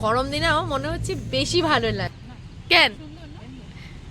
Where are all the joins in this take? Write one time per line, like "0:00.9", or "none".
0:02.2